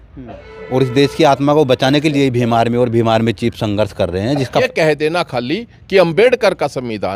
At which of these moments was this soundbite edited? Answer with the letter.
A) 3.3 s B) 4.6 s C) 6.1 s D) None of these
B